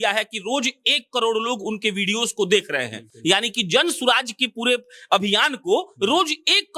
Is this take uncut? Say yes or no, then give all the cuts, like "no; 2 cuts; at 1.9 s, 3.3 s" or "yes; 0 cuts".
yes; 0 cuts